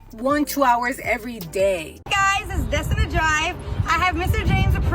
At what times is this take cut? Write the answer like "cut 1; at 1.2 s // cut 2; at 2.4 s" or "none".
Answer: cut 1; at 2.2 s